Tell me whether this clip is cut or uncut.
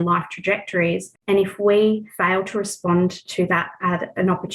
cut